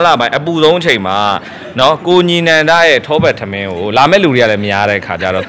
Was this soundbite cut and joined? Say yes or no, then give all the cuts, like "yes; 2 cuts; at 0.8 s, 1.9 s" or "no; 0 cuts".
no; 0 cuts